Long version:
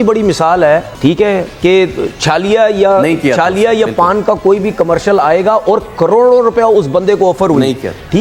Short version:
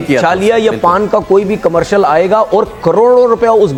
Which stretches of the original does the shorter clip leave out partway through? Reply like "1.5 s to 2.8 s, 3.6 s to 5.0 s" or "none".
none